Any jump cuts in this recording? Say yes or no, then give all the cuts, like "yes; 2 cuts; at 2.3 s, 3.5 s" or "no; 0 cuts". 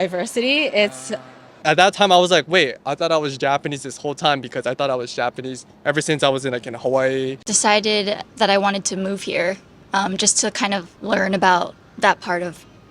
yes; 2 cuts; at 1.6 s, 7.4 s